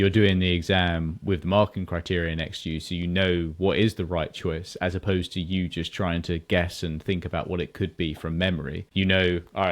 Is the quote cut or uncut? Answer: cut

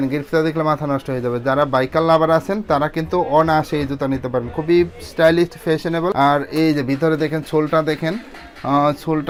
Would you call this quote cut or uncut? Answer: uncut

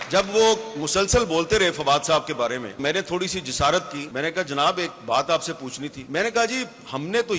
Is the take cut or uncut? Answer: cut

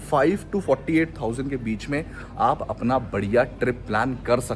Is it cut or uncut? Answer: uncut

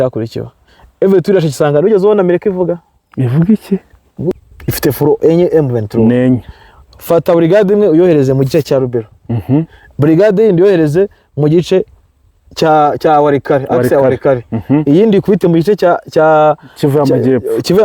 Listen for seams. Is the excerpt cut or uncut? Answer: cut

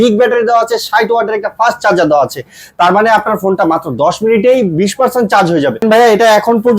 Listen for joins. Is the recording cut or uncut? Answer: cut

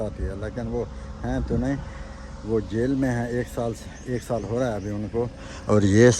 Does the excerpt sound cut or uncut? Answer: uncut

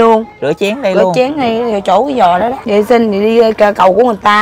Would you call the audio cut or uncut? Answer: cut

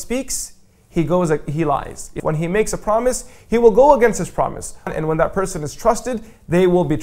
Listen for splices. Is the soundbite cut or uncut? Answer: cut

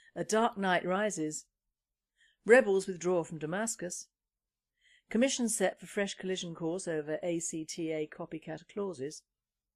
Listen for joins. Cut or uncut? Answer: uncut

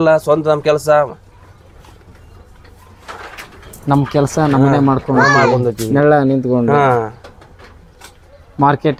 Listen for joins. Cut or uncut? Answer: uncut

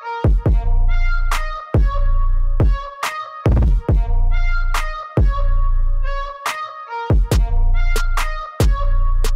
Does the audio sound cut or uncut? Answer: uncut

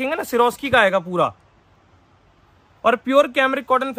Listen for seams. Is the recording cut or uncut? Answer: uncut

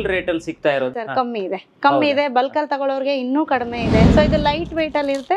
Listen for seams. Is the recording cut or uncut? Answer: cut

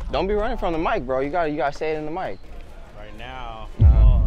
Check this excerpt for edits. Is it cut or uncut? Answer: cut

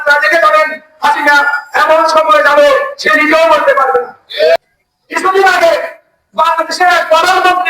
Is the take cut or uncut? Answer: cut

